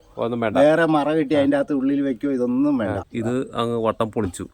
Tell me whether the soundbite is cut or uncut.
cut